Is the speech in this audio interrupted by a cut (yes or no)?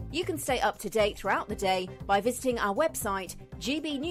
no